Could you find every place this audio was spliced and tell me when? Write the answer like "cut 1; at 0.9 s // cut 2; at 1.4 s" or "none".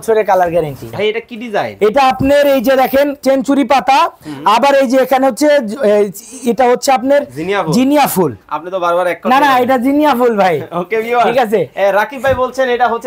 cut 1; at 0.9 s